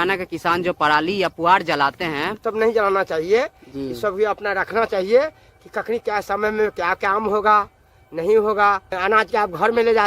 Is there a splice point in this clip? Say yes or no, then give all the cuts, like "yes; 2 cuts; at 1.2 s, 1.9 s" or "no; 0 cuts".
yes; 2 cuts; at 2.4 s, 9.0 s